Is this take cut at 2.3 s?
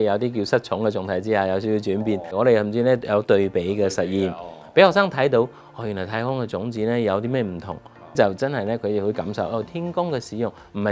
yes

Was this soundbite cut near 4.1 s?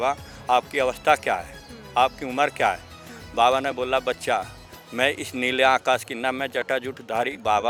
no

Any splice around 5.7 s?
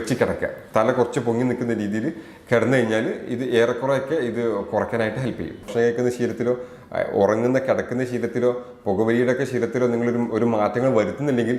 yes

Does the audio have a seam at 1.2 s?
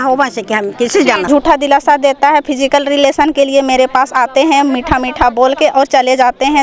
yes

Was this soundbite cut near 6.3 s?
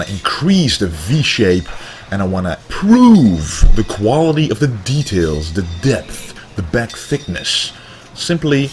no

